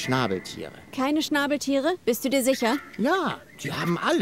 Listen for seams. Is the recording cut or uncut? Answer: uncut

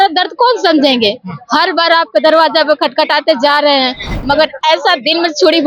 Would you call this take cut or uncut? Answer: cut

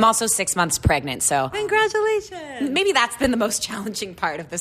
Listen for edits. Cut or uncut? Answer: cut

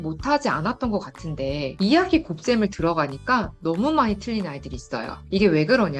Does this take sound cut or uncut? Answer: cut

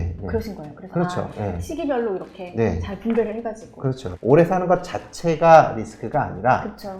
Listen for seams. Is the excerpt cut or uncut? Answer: cut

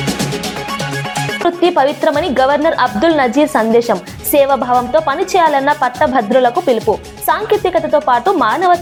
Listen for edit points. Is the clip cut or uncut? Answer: uncut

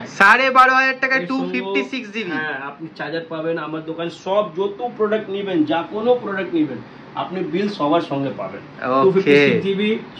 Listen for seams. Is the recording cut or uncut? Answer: uncut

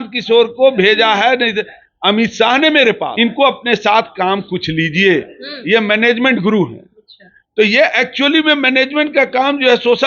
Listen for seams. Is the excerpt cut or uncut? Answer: cut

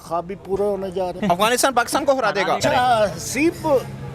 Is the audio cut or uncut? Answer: cut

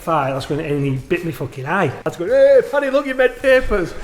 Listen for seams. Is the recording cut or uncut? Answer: cut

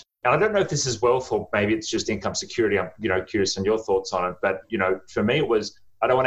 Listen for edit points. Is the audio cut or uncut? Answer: uncut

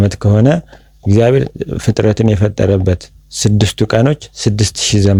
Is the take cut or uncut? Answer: uncut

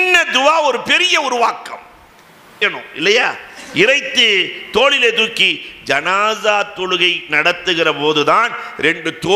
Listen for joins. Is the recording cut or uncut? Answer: cut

